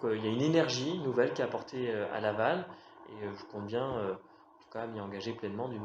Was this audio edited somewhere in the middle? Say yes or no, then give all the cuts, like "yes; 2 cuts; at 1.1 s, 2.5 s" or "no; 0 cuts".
no; 0 cuts